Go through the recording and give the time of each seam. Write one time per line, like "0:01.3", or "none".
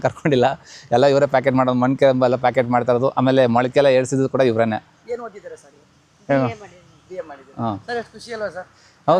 none